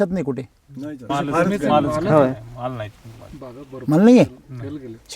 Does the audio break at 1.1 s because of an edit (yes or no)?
yes